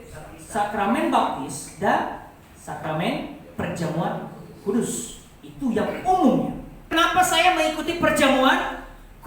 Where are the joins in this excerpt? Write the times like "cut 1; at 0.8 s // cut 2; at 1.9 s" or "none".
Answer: cut 1; at 6.9 s